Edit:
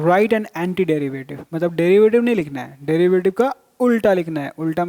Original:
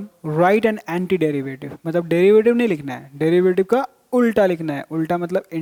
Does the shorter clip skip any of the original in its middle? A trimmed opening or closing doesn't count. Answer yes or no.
no